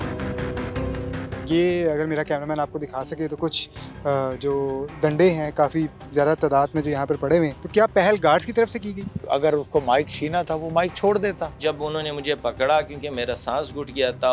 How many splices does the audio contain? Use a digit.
4